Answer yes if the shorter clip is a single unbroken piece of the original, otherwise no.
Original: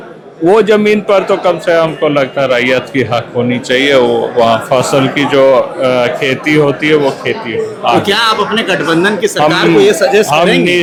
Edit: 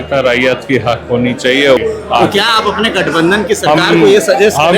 no